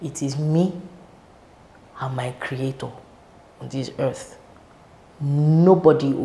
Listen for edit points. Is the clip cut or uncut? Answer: uncut